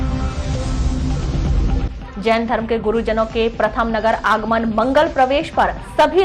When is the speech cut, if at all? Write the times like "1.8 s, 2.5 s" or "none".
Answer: 1.7 s